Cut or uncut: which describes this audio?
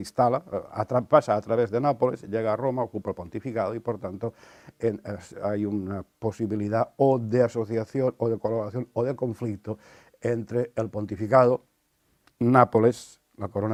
uncut